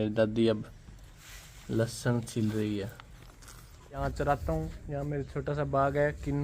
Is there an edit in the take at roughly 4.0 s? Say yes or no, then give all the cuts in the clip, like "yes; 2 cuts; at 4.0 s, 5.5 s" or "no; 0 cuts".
yes; 1 cut; at 4.0 s